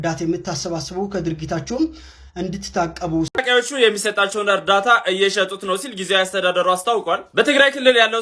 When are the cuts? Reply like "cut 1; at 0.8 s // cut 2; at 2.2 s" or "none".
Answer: cut 1; at 3.4 s